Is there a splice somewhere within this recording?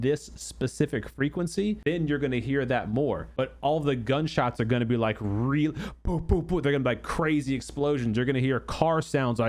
yes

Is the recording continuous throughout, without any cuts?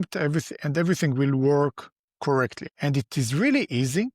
no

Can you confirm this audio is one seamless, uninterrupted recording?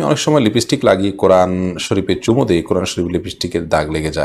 yes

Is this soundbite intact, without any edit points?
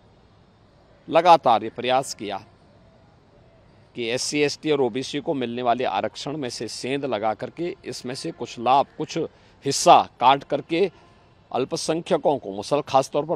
yes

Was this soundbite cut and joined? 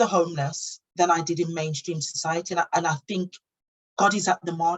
yes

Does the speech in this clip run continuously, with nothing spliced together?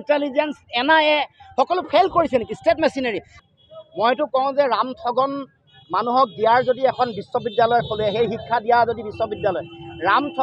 no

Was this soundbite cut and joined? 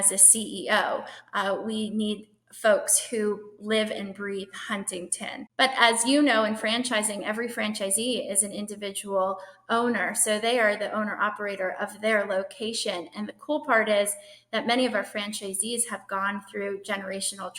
yes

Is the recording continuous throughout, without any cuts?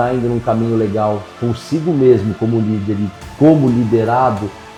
yes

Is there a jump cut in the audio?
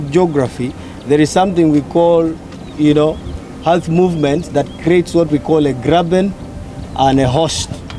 no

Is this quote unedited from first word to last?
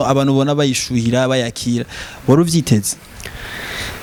yes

